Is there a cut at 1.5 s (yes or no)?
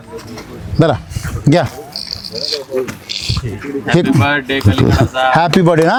no